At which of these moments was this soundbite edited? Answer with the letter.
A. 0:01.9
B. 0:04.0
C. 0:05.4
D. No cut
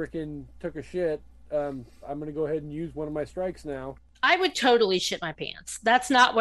B